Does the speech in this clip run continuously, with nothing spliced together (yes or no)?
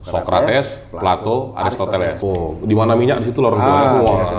no